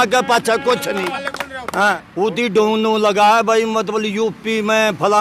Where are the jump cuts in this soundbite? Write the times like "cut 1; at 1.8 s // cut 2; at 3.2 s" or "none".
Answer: cut 1; at 2.0 s